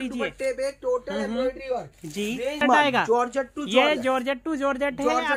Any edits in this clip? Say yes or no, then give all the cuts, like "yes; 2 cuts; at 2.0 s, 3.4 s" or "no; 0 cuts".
yes; 1 cut; at 2.6 s